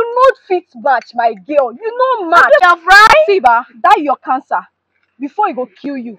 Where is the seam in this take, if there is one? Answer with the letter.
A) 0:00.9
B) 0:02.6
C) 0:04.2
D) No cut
B